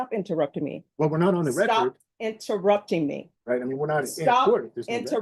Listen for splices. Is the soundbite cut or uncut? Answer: cut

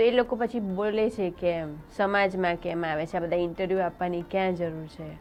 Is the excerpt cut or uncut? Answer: uncut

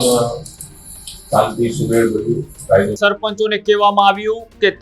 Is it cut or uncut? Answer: cut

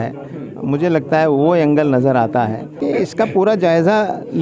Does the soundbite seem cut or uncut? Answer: cut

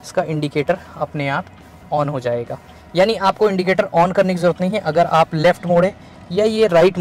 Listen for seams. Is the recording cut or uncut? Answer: uncut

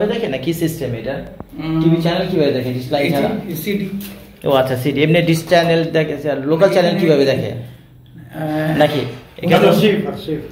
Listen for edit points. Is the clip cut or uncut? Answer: uncut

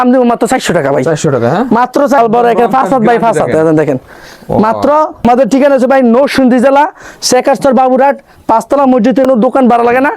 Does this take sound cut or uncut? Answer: cut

